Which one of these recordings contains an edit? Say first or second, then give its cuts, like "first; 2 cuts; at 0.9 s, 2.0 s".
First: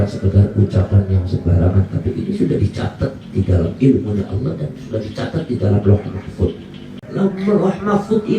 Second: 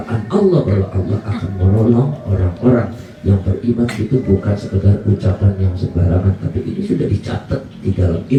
first; 1 cut; at 7.0 s